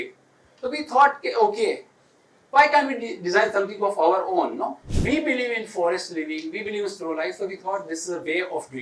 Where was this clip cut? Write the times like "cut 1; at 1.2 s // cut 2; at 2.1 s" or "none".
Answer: cut 1; at 4.9 s

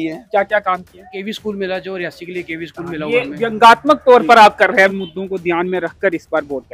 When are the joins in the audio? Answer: cut 1; at 1.2 s // cut 2; at 4.9 s

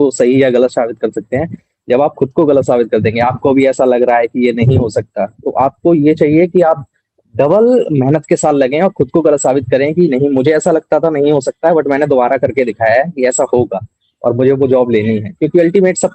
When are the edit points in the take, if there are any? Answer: none

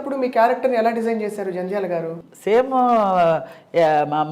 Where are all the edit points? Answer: cut 1; at 2.1 s

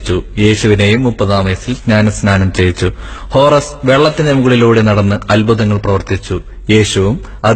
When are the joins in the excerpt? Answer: cut 1; at 3.0 s

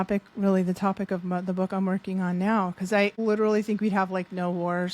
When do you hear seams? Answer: cut 1; at 3.2 s

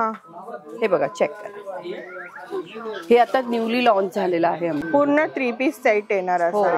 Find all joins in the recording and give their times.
cut 1; at 4.8 s

